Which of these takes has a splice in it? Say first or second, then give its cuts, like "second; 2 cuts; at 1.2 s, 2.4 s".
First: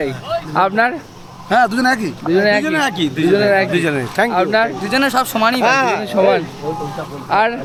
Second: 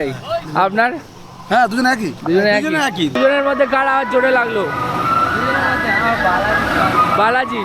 second; 1 cut; at 3.1 s